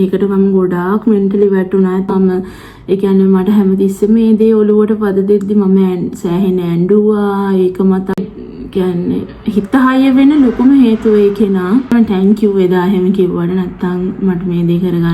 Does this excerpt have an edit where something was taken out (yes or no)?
yes